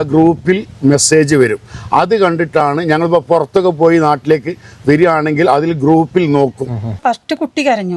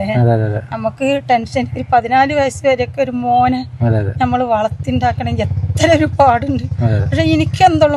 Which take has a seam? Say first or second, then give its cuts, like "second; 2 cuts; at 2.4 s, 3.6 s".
first; 1 cut; at 7.0 s